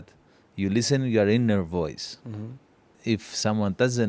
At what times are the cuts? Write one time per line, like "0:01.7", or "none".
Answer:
0:02.9